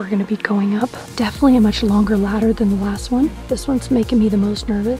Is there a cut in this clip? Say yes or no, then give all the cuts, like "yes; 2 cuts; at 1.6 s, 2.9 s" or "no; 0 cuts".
yes; 1 cut; at 3.5 s